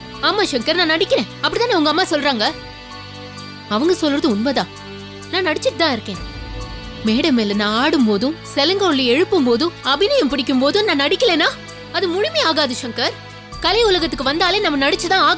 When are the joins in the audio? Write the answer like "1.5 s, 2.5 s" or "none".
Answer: none